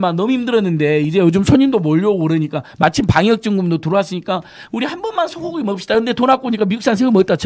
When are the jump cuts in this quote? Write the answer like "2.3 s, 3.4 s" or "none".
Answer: none